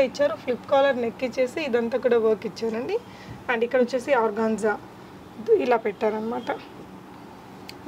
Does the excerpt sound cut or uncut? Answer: uncut